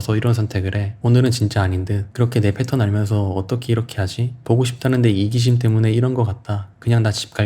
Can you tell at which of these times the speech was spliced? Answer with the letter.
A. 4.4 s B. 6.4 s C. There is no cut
A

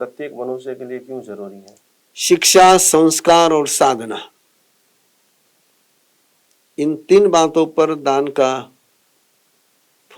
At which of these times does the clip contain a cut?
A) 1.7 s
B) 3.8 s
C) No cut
A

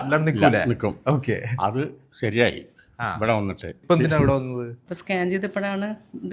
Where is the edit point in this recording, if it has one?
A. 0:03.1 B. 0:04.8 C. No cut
B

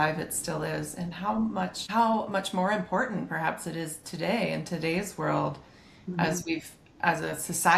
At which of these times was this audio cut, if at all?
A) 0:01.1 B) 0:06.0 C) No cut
C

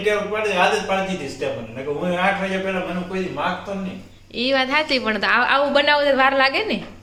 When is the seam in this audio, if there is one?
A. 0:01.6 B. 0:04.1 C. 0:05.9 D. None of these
D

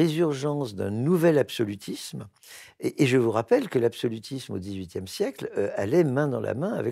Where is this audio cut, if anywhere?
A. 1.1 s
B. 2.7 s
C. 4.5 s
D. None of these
D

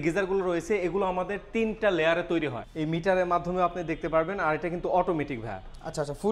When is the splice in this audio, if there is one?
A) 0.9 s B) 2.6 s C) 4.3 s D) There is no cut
B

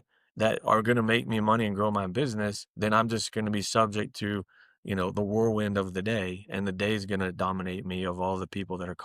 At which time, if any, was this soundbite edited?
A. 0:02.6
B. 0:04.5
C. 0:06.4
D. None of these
D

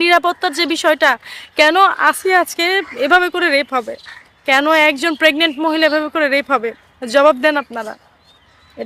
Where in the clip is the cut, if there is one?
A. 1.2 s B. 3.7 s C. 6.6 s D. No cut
D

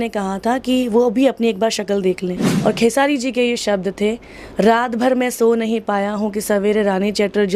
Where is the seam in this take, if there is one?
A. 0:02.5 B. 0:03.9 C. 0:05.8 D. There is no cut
A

